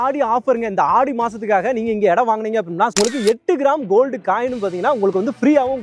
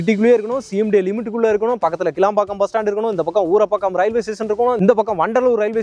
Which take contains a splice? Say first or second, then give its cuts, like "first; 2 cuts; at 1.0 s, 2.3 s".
first; 1 cut; at 2.9 s